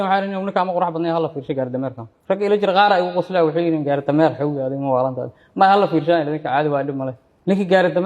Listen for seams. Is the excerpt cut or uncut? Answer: cut